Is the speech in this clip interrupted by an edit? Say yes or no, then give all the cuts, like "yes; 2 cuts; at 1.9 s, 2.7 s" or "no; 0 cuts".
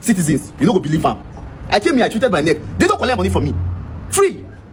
no; 0 cuts